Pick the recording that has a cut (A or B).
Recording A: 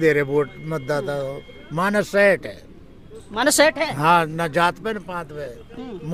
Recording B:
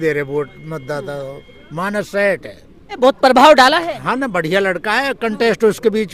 B